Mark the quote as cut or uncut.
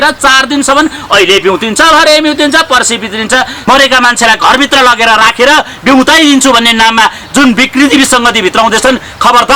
cut